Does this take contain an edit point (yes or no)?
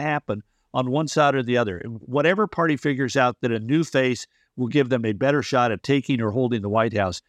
yes